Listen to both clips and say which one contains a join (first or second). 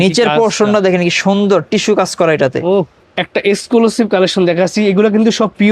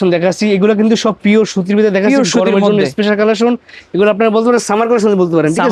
first